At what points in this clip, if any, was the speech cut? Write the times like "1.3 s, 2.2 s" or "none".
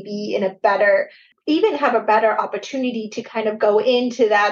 1.2 s